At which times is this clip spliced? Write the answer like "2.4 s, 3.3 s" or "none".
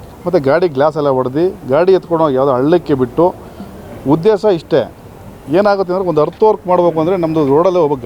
none